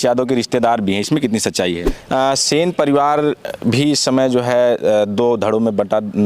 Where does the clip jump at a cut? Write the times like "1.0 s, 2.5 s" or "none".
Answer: 1.9 s